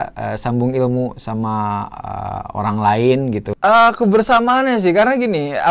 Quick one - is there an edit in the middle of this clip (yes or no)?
yes